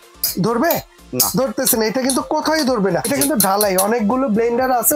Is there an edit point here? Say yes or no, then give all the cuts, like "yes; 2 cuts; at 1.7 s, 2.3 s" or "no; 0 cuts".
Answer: yes; 1 cut; at 3.0 s